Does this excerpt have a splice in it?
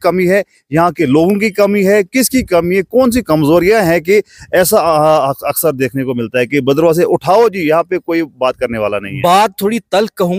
no; 0 cuts

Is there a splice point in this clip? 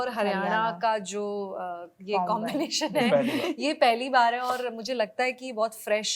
no; 0 cuts

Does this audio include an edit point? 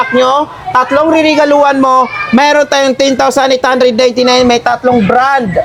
no; 0 cuts

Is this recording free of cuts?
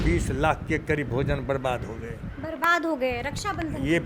yes; 0 cuts

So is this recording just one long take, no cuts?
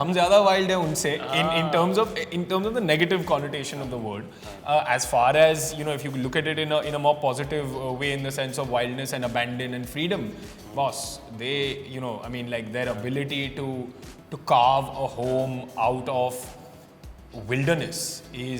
yes; 0 cuts

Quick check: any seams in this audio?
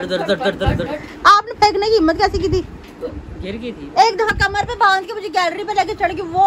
yes; 1 cut; at 1.2 s

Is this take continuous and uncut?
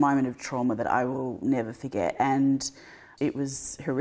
yes; 0 cuts

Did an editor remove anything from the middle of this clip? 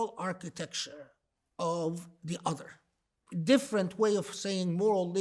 yes; 1 cut; at 3.1 s

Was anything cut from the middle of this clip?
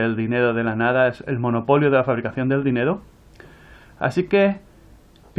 yes; 1 cut; at 3.3 s

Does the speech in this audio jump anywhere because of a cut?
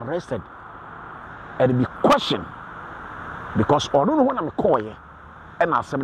no; 0 cuts

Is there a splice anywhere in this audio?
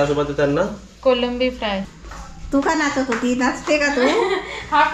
yes; 1 cut; at 2.0 s

